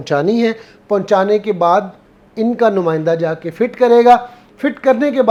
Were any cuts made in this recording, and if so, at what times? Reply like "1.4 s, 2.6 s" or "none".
none